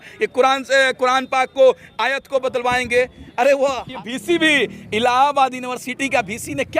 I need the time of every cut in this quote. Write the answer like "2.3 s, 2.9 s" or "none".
3.9 s